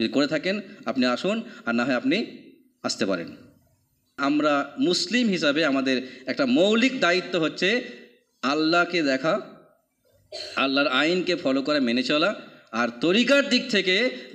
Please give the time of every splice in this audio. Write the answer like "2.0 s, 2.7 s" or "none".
4.2 s